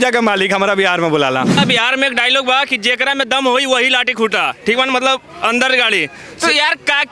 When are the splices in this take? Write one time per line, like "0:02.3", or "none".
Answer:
0:01.6